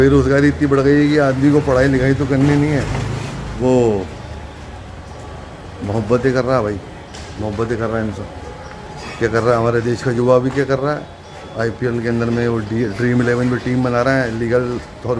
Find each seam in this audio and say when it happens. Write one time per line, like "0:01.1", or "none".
none